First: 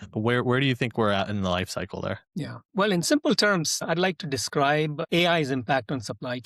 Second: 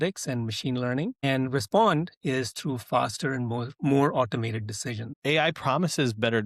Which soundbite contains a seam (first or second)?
second